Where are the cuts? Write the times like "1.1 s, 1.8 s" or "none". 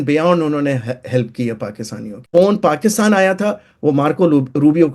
2.1 s